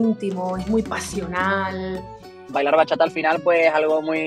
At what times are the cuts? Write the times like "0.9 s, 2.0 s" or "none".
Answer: 2.5 s